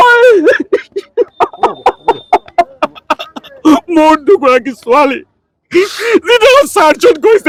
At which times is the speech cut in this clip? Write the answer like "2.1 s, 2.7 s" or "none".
none